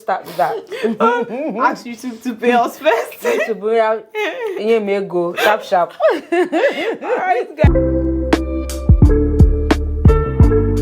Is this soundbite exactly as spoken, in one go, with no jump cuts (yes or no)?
no